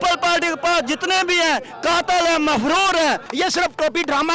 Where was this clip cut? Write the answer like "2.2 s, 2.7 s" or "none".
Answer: 3.3 s